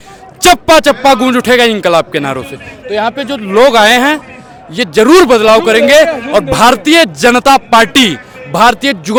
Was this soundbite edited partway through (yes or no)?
no